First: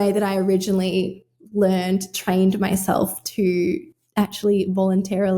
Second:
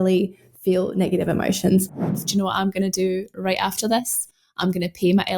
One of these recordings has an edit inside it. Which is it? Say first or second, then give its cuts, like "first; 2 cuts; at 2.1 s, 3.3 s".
second; 1 cut; at 2.1 s